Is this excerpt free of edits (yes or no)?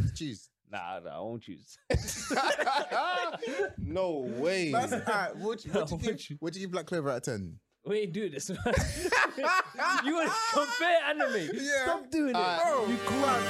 yes